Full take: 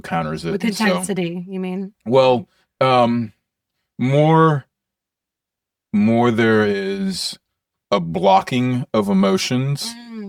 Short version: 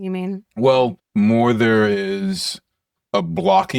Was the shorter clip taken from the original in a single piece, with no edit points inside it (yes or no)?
no